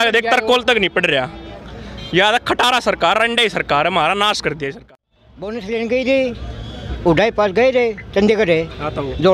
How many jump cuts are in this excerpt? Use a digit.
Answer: 1